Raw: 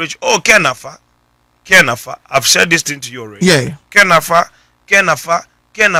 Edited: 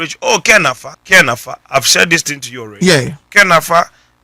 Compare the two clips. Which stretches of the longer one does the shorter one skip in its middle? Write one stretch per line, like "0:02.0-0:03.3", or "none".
0:00.9-0:01.5